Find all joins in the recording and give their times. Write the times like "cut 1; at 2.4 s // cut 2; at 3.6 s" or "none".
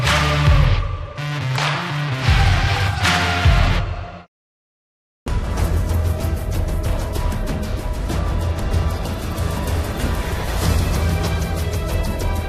none